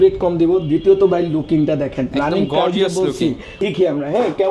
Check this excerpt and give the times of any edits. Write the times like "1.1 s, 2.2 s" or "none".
3.6 s